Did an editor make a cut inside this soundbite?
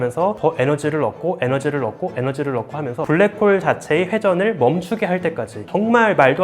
yes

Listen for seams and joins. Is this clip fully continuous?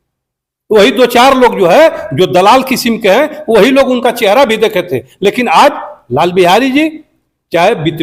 yes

